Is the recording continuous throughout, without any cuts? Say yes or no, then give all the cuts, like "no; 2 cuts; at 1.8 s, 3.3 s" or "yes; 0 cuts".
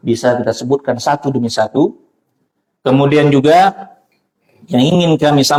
yes; 0 cuts